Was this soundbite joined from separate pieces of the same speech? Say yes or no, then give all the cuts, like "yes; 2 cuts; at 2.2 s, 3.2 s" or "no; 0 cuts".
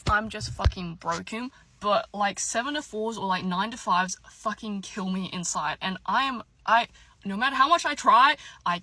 no; 0 cuts